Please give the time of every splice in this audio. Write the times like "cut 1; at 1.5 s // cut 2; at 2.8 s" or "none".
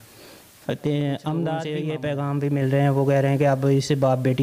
cut 1; at 1.7 s